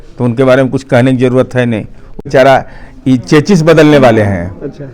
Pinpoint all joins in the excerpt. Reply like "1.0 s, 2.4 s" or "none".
2.2 s